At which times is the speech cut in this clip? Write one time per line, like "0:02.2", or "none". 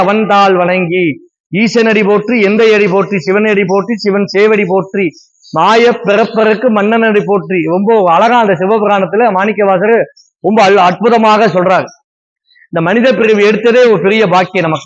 none